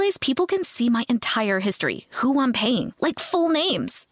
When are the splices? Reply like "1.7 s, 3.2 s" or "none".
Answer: none